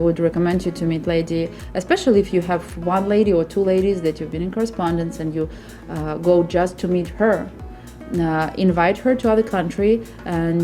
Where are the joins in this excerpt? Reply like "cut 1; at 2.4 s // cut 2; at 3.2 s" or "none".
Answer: none